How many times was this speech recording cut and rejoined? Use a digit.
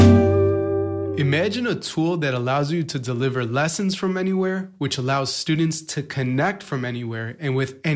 1